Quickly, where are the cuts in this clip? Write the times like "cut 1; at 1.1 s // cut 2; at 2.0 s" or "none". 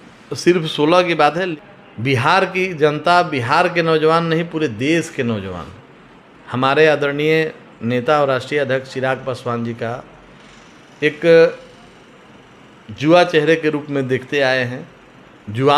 cut 1; at 1.5 s